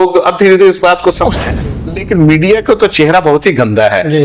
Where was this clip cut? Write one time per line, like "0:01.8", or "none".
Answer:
0:01.5